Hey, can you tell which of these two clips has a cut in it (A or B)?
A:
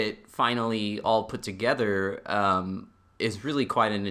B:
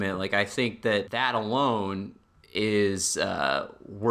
B